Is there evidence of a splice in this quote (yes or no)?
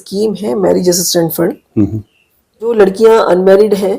yes